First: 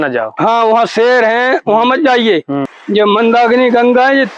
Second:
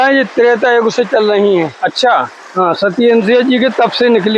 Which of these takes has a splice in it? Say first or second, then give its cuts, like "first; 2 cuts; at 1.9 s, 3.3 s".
first; 1 cut; at 2.7 s